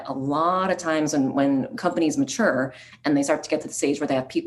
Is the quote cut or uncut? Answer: cut